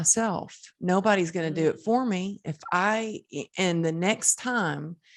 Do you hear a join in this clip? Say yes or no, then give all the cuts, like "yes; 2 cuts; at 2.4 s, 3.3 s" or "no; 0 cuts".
no; 0 cuts